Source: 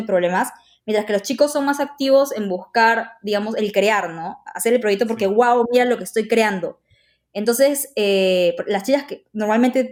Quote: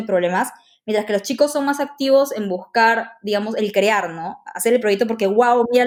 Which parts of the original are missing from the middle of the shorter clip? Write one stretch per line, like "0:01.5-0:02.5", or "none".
none